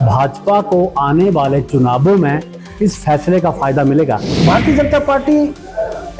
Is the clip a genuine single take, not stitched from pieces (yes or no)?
no